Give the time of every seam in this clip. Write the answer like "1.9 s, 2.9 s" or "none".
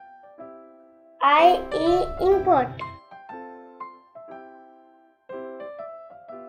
1.1 s, 3.0 s

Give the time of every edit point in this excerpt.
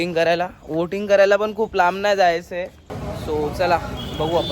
2.9 s

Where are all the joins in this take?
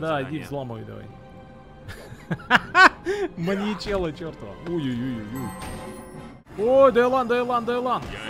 6.4 s

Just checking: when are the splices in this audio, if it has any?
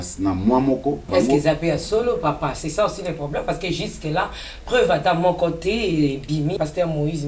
1.1 s, 6.6 s

